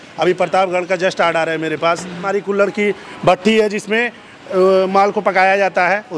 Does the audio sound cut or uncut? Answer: cut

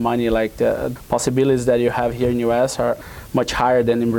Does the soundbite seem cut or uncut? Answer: uncut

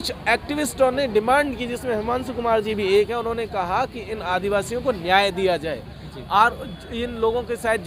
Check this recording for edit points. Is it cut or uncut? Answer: uncut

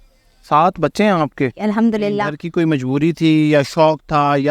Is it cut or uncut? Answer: cut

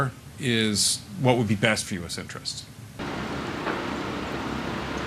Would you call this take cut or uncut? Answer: uncut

